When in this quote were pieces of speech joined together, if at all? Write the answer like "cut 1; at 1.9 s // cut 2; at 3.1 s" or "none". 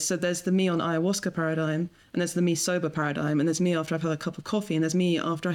none